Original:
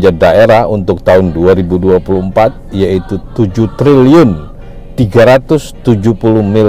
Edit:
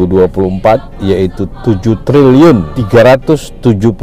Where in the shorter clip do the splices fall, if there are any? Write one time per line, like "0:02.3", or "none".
0:02.7